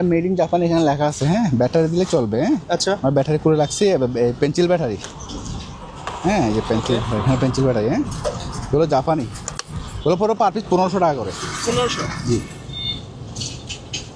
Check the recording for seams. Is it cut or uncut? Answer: uncut